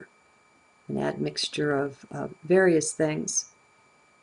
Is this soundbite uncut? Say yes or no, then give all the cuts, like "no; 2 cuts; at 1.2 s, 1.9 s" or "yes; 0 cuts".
no; 1 cut; at 2.8 s